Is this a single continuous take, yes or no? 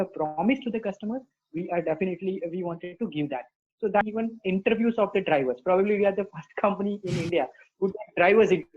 no